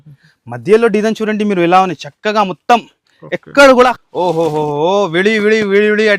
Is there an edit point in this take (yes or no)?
yes